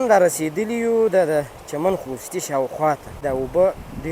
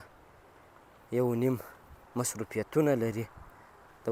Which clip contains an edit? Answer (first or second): first